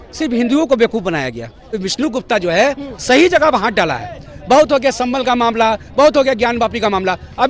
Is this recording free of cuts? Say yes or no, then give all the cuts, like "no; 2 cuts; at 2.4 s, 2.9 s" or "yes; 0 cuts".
no; 1 cut; at 1.8 s